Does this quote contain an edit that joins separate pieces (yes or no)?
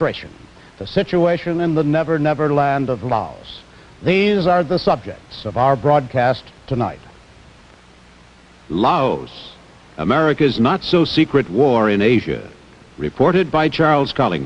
yes